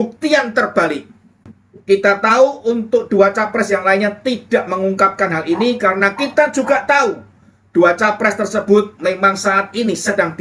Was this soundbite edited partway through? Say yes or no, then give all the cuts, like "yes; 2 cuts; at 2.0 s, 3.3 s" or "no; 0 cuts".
no; 0 cuts